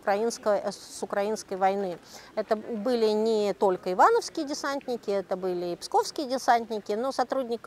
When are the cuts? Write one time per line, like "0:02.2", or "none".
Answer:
none